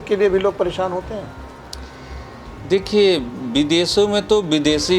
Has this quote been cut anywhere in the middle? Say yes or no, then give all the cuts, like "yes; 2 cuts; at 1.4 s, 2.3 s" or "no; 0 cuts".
no; 0 cuts